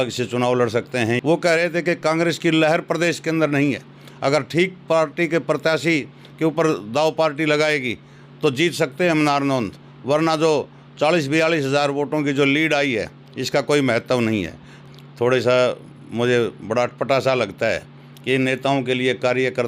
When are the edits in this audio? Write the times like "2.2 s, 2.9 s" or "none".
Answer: 1.2 s, 14.8 s